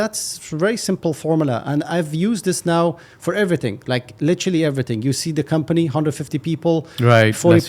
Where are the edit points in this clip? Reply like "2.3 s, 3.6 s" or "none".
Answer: none